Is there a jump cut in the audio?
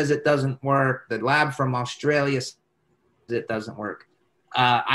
no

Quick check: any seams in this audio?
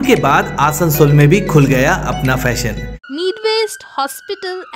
yes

